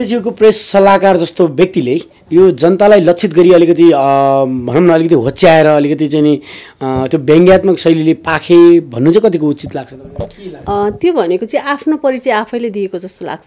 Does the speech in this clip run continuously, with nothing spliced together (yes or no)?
yes